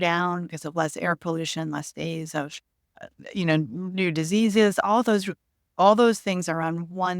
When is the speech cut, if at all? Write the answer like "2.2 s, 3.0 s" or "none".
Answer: 3.0 s